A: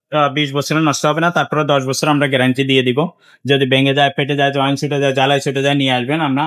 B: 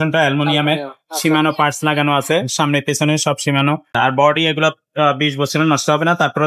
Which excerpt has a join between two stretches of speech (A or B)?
B